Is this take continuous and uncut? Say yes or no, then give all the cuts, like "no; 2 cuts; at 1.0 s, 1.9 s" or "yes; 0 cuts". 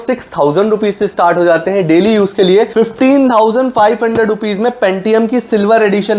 no; 1 cut; at 2.7 s